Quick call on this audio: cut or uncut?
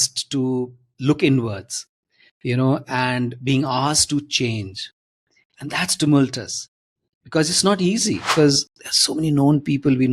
cut